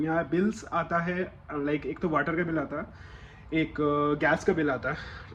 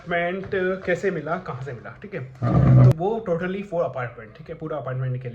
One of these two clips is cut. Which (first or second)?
second